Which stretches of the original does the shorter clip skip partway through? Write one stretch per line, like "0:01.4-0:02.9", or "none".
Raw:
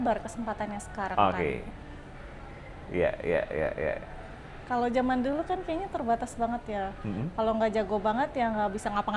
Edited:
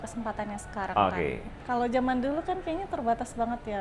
0:01.7-0:04.5